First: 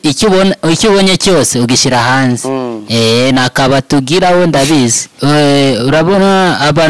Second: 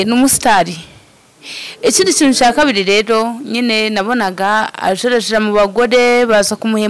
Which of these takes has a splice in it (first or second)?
first